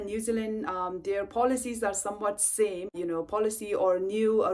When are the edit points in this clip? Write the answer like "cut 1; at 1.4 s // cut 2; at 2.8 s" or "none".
cut 1; at 2.9 s